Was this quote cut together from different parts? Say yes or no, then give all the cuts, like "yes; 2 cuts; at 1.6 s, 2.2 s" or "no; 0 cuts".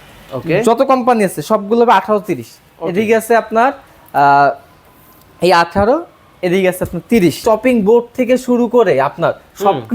yes; 1 cut; at 7.4 s